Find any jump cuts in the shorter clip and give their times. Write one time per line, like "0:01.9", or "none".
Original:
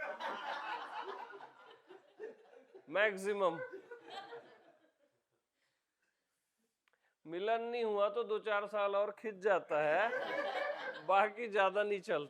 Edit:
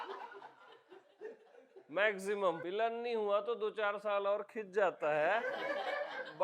0:02.6